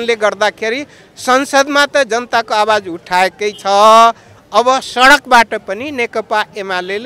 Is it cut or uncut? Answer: uncut